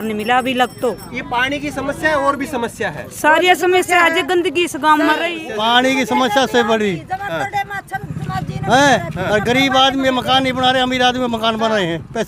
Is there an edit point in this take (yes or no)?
yes